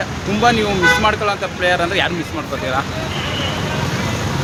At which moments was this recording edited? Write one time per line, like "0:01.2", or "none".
none